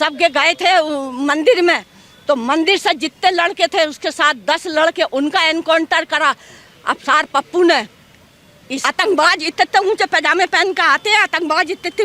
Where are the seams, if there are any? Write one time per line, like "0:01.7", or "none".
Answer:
0:08.8